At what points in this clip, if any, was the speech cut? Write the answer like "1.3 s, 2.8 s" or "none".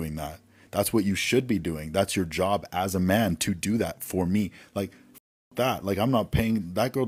none